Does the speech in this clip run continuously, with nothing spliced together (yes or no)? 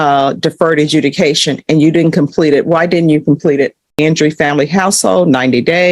no